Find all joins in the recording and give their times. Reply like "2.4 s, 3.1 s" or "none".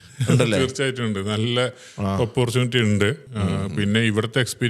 3.3 s